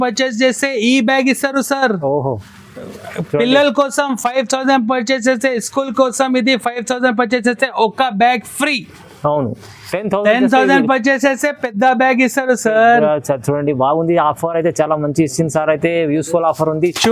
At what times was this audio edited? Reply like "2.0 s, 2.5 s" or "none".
none

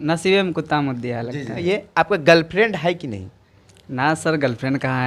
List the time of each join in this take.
1.6 s

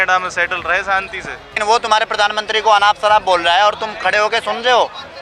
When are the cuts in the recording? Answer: 1.6 s

